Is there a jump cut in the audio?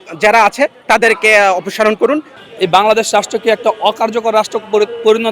yes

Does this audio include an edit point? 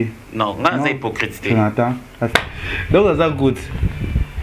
yes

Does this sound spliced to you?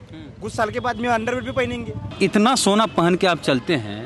yes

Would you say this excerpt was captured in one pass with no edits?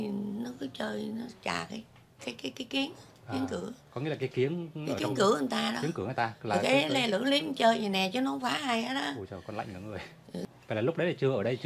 no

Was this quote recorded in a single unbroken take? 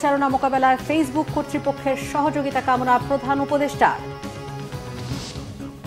no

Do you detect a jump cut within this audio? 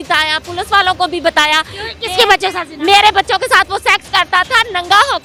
no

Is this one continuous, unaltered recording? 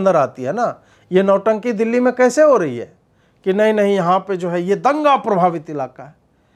yes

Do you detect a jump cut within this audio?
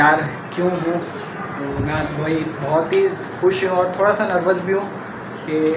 no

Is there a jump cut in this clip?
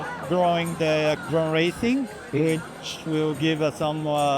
yes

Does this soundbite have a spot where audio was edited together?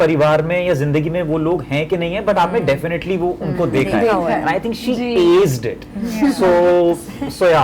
no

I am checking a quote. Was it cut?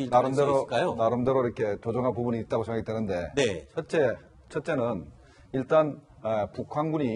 no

